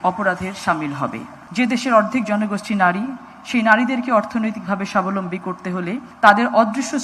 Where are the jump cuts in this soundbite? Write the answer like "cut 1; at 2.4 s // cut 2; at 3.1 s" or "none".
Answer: cut 1; at 1.4 s // cut 2; at 6.1 s

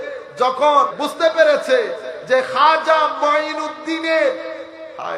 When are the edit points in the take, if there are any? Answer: cut 1; at 1.0 s

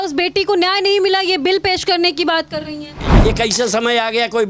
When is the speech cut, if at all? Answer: cut 1; at 3.1 s

